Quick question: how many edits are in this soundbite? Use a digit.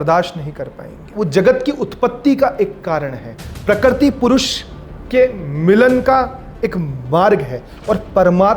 1